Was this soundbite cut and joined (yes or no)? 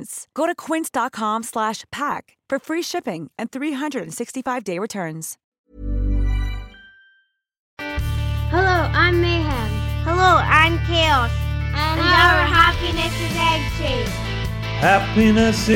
yes